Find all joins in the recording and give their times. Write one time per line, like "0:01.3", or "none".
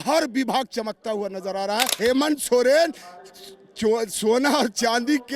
0:01.9